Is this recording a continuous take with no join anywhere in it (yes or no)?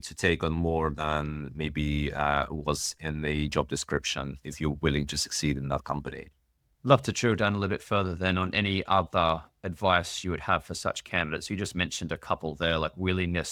yes